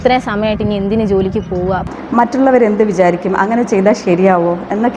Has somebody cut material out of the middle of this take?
yes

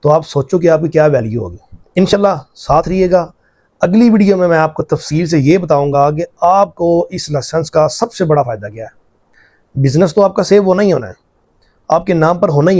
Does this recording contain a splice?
no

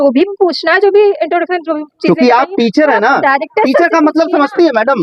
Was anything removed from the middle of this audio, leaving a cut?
no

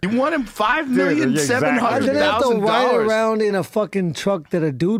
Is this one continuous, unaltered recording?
yes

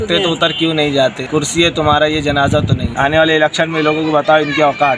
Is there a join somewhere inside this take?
yes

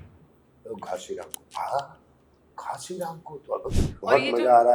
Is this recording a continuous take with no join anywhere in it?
no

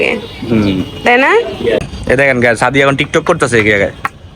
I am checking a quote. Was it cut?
yes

